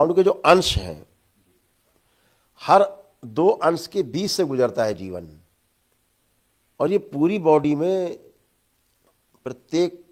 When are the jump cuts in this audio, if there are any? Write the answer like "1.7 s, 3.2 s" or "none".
none